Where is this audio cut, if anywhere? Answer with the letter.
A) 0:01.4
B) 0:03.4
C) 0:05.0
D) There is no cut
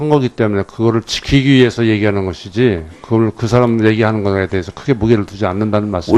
B